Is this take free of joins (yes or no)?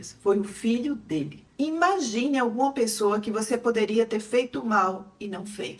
no